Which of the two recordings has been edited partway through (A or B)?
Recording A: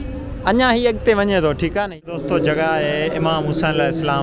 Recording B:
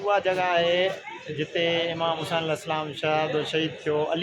A